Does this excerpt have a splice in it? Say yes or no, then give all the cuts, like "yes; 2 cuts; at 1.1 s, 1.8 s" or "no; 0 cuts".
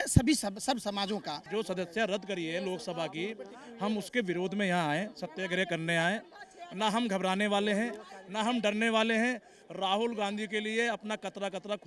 yes; 1 cut; at 1.4 s